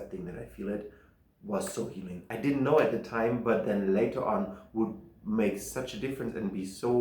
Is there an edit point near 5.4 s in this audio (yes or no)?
no